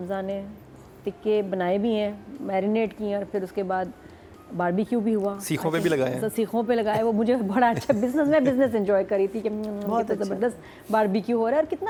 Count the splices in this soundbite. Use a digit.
0